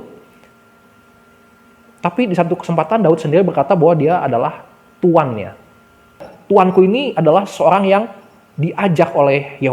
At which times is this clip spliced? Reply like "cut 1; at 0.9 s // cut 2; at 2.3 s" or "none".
cut 1; at 6.3 s